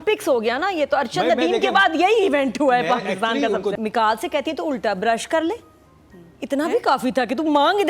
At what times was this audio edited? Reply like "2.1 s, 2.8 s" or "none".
3.7 s